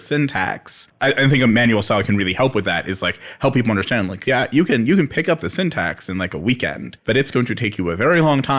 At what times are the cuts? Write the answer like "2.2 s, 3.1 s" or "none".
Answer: 0.9 s, 6.9 s